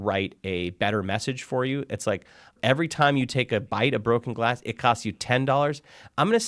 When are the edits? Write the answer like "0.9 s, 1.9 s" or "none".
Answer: 2.6 s